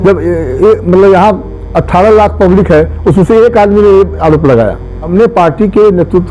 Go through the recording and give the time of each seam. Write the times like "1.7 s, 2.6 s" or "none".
4.9 s

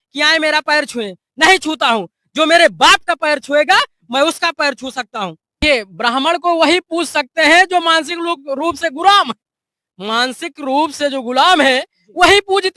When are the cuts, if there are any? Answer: 5.6 s

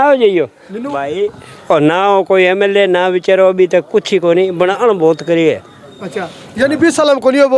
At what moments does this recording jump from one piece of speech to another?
none

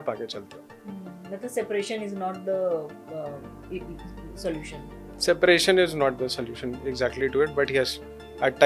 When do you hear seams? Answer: none

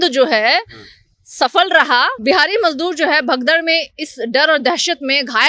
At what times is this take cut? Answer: 2.1 s

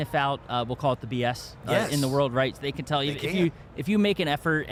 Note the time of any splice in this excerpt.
none

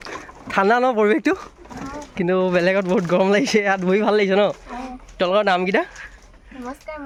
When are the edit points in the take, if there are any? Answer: none

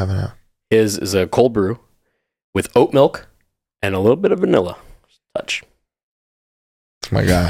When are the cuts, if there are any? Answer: none

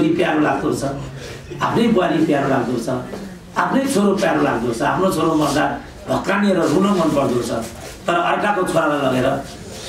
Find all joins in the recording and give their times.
none

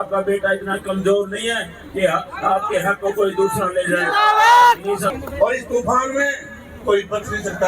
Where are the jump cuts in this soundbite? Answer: 5.1 s

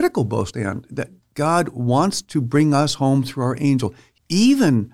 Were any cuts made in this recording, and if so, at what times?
1.2 s, 4.0 s

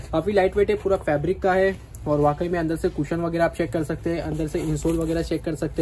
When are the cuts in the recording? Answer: none

